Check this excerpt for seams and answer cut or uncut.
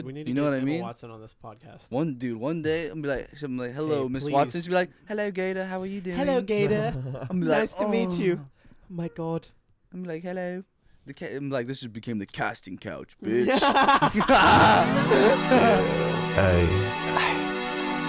cut